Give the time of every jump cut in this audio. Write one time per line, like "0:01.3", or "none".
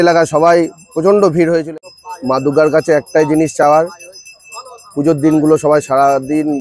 0:01.7

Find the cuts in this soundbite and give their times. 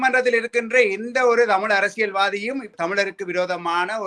0:02.7

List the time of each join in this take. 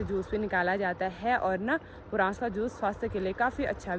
none

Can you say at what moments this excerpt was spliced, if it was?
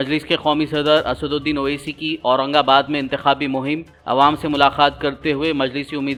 none

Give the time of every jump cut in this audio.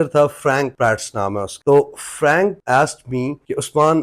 0:01.5

